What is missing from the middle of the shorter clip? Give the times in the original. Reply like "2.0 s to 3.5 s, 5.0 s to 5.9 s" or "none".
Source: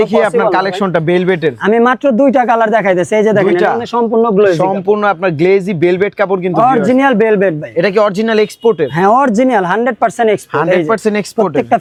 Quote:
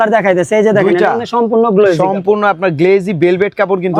none